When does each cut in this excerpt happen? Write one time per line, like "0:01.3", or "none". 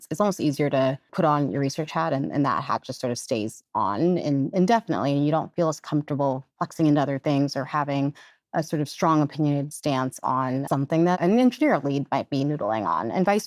0:01.1
0:11.1